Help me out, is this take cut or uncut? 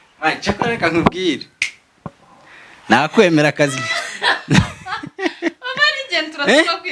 uncut